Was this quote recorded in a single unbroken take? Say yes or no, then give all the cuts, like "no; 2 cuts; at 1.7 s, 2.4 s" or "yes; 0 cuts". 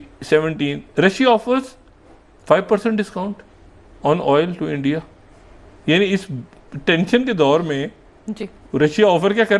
yes; 0 cuts